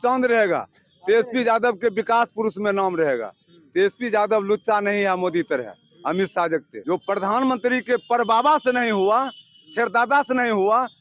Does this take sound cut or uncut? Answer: cut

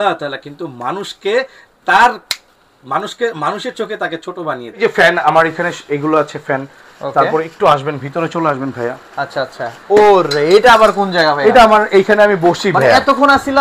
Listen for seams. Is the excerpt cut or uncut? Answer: cut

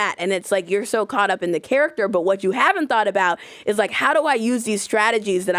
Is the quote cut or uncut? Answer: uncut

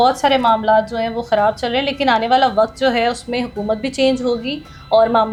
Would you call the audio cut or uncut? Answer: uncut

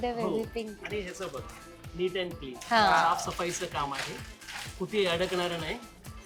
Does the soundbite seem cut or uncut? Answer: uncut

